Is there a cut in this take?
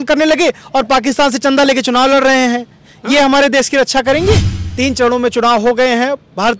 yes; 1 cut; at 4.7 s

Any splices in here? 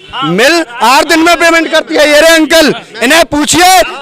no; 0 cuts

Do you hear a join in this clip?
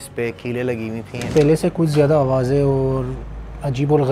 yes; 1 cut; at 1.3 s

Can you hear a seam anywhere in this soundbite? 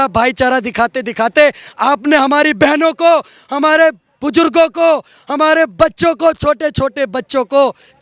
no; 0 cuts

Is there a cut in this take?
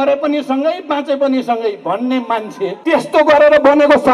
yes; 1 cut; at 2.8 s

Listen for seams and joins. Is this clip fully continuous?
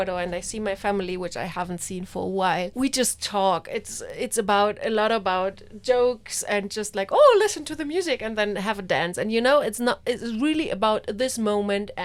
yes; 0 cuts

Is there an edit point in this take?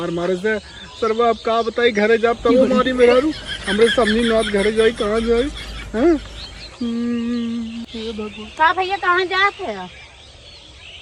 no; 0 cuts

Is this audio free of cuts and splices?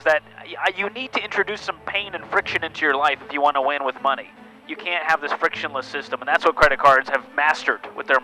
yes; 0 cuts

